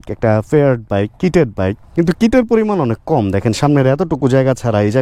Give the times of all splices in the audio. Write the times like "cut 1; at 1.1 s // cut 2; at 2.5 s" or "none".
none

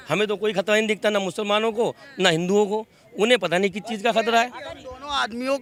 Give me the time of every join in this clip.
none

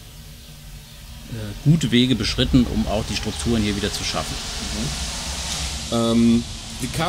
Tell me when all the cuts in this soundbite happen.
none

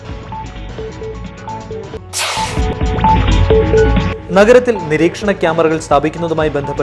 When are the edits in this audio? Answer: none

